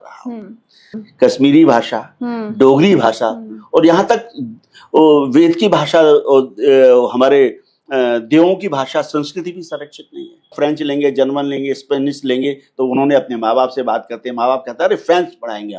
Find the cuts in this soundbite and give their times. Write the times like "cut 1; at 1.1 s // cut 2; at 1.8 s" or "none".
cut 1; at 1.0 s // cut 2; at 10.5 s

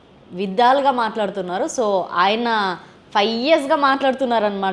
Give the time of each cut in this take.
none

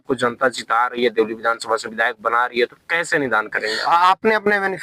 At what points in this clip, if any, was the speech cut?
cut 1; at 3.7 s

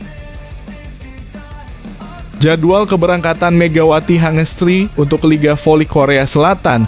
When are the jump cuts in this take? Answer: cut 1; at 2.4 s

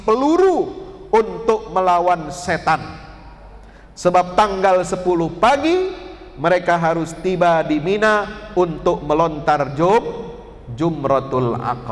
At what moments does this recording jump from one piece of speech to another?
none

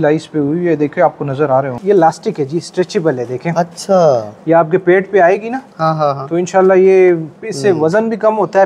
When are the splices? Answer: cut 1; at 1.7 s

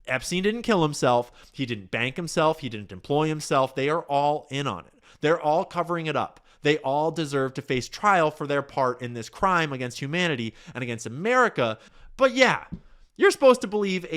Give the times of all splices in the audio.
cut 1; at 11.9 s

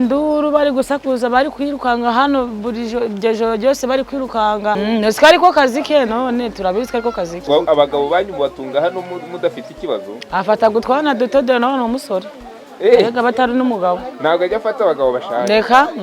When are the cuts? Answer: cut 1; at 4.8 s // cut 2; at 7.4 s

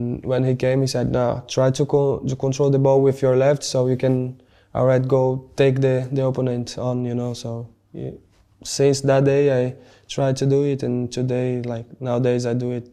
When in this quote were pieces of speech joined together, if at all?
none

